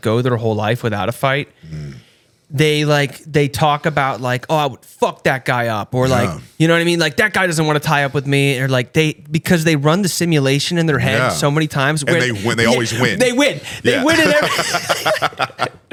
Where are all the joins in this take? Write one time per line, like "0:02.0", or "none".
none